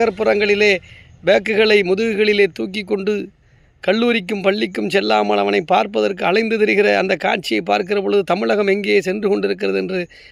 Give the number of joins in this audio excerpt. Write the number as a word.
one